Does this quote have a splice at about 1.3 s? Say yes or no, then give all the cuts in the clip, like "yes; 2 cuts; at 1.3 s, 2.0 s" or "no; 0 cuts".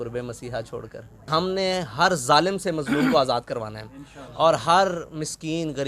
yes; 1 cut; at 1.3 s